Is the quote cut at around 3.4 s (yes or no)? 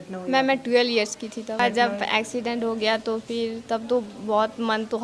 no